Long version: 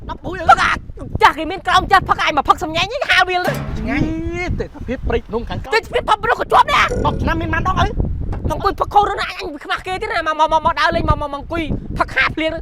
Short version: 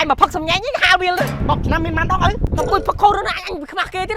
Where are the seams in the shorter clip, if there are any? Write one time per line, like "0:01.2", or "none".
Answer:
0:01.4
0:02.4